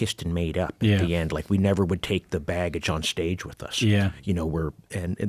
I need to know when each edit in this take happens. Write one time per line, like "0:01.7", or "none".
none